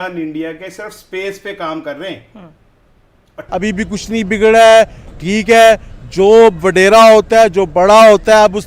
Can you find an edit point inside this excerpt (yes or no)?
yes